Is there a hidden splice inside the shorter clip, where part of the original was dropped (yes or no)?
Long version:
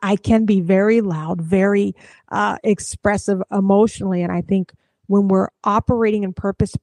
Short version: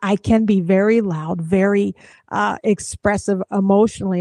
no